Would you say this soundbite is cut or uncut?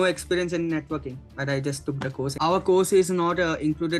cut